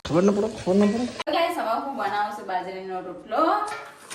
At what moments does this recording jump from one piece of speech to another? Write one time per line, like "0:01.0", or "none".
0:01.2